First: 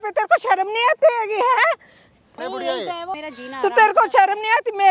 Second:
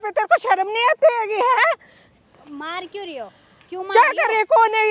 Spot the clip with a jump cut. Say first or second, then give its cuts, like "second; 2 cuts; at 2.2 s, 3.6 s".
first; 2 cuts; at 2.4 s, 3.2 s